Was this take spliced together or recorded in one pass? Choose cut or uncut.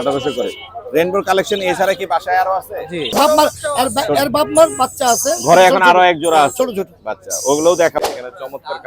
cut